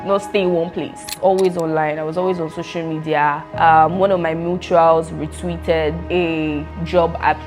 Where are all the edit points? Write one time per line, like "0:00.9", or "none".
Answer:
0:01.2
0:03.4
0:06.5